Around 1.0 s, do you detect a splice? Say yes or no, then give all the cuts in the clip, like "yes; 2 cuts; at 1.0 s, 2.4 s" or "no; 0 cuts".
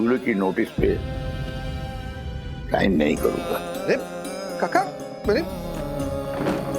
yes; 3 cuts; at 1.0 s, 2.7 s, 3.5 s